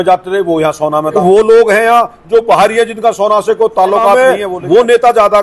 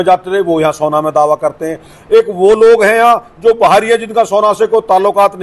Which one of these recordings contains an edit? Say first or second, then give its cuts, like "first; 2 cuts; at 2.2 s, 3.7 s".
first; 2 cuts; at 1.2 s, 4.1 s